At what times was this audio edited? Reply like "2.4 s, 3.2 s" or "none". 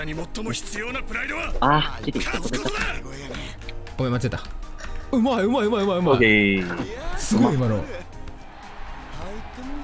none